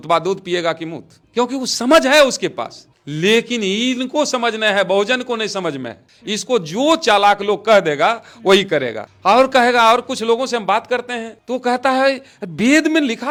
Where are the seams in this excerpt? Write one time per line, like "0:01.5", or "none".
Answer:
none